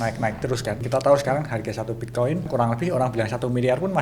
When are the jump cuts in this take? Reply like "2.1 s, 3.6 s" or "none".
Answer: 0.8 s, 2.5 s